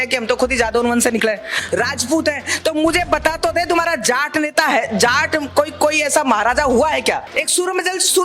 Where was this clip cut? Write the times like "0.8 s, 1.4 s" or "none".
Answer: 7.3 s